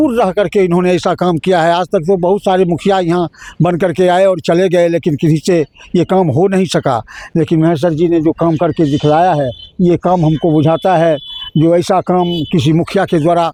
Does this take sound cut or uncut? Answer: uncut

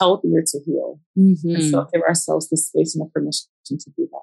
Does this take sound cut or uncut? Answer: cut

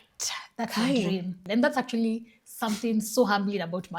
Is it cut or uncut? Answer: cut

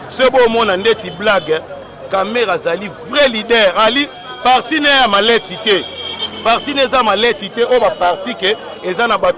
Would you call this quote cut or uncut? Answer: uncut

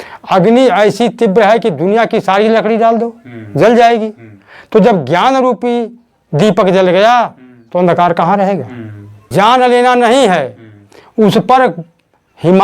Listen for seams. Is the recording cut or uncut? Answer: cut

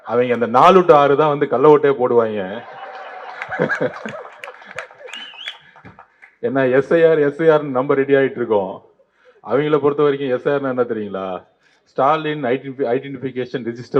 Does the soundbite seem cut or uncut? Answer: uncut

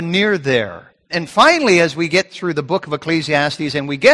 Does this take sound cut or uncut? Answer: cut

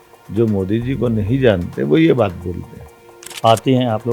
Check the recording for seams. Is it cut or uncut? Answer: cut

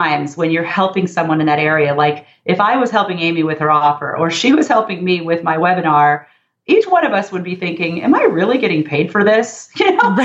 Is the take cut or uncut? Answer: uncut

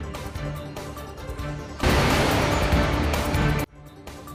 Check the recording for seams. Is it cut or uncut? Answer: uncut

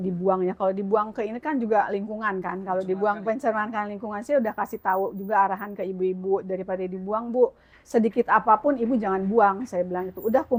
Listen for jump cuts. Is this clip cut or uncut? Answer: uncut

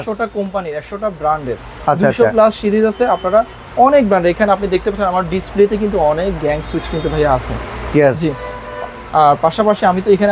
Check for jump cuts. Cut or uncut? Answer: uncut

